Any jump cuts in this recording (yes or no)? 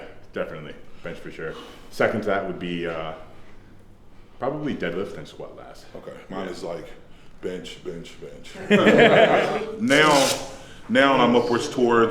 yes